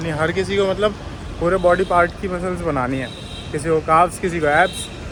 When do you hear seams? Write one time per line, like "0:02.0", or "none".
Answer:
none